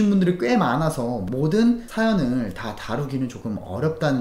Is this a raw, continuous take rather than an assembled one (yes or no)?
no